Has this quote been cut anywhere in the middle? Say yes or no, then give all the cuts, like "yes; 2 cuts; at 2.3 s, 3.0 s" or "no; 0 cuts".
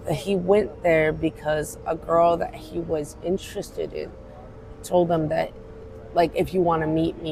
no; 0 cuts